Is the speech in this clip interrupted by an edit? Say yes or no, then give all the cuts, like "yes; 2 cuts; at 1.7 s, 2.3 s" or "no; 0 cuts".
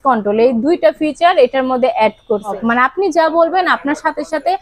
yes; 1 cut; at 2.6 s